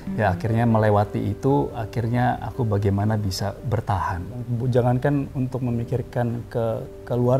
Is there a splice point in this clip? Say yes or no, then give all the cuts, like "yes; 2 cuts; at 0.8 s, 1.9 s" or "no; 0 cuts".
yes; 1 cut; at 4.5 s